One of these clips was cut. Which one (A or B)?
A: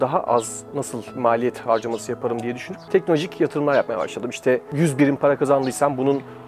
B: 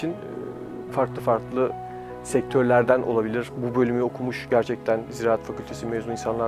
A